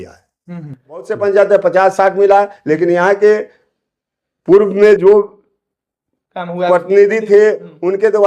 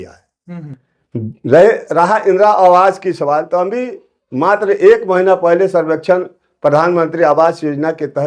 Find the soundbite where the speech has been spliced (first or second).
first